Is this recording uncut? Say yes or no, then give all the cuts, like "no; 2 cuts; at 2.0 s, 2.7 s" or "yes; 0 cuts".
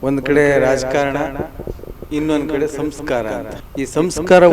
no; 1 cut; at 3.5 s